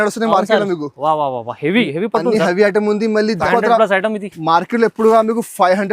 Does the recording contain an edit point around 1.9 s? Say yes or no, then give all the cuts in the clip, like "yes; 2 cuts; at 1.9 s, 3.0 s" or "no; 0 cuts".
no; 1 cut; at 3.4 s